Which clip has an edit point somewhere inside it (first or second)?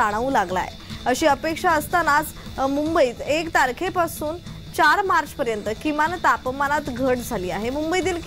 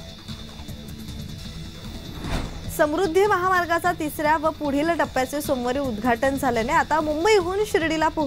second